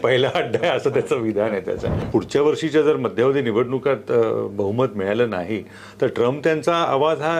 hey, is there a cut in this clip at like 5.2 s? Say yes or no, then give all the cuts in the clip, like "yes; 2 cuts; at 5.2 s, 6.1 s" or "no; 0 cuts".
no; 1 cut; at 1.9 s